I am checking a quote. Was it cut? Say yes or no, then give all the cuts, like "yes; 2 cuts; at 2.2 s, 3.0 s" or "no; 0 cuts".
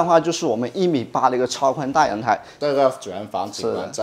yes; 1 cut; at 2.5 s